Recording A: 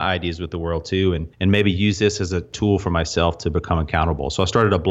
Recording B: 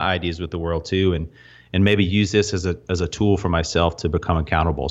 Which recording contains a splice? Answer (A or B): A